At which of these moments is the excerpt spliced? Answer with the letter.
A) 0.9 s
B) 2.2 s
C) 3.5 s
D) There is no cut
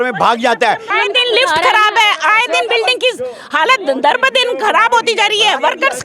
A